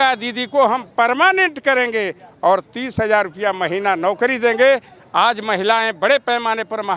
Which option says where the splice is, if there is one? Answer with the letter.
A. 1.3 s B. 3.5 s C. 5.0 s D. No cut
D